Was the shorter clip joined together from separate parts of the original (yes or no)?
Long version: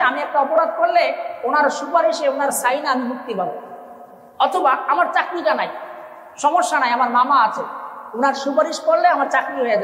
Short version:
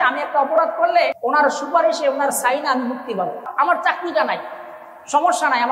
yes